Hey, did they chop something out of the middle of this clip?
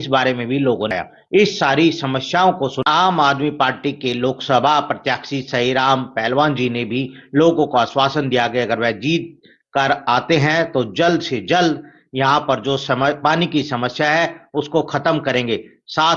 yes; 1 cut; at 0.9 s

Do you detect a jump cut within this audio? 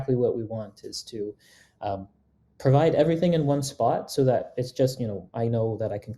no; 0 cuts

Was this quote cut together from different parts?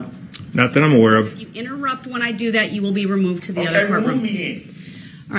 yes; 1 cut; at 1.7 s

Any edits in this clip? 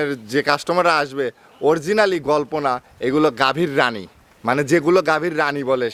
no; 0 cuts

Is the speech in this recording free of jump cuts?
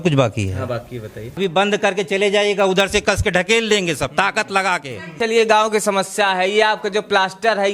no; 2 cuts; at 1.4 s, 5.2 s

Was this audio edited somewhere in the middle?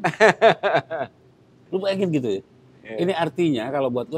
no; 0 cuts

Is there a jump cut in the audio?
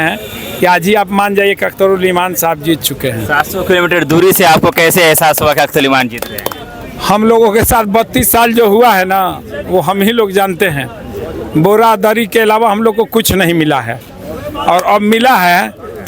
no; 0 cuts

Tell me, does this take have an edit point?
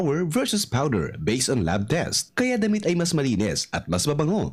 no; 0 cuts

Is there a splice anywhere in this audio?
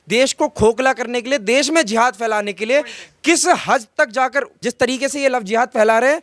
yes; 1 cut; at 4.5 s

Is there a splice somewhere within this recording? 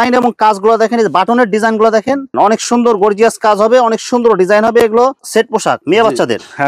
yes; 2 cuts; at 2.3 s, 5.2 s

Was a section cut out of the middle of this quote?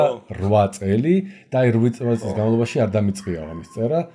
no; 0 cuts

